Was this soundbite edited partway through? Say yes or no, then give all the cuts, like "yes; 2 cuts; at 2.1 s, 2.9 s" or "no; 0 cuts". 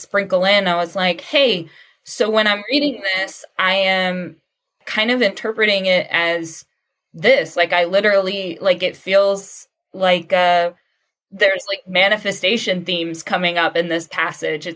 no; 0 cuts